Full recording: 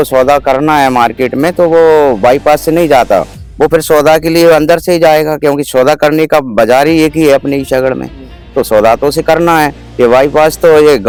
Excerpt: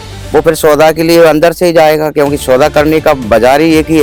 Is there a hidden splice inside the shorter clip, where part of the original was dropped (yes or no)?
no